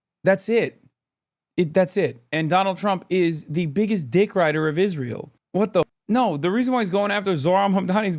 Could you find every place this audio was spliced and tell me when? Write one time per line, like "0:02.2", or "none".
0:05.9